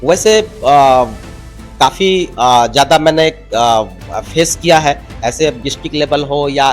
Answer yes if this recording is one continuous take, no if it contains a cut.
no